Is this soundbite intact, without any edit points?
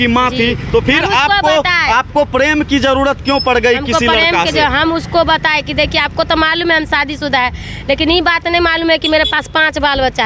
yes; 0 cuts

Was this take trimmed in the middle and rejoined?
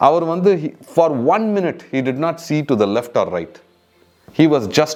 no; 0 cuts

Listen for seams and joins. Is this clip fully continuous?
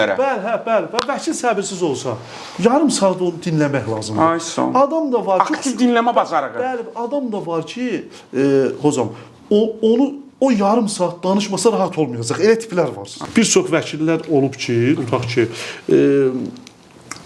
no; 1 cut; at 13.2 s

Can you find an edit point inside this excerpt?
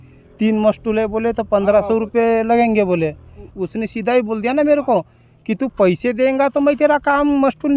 yes; 1 cut; at 3.5 s

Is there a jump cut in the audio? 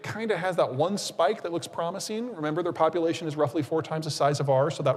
no; 0 cuts

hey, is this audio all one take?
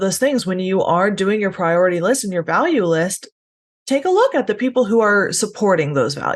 yes; 0 cuts

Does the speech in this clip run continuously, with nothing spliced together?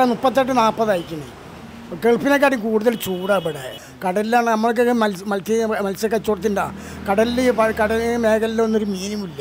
no; 1 cut; at 3.7 s

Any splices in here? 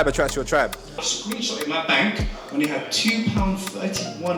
yes; 1 cut; at 1.1 s

